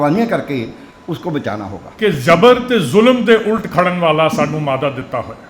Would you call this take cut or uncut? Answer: cut